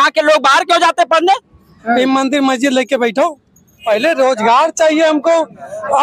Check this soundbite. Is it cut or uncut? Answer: cut